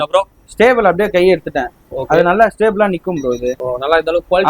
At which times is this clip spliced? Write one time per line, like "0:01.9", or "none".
0:03.6